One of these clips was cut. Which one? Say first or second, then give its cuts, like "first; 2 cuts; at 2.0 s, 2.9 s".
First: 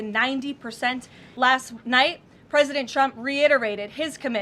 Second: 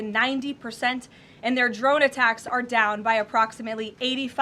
first; 1 cut; at 1.2 s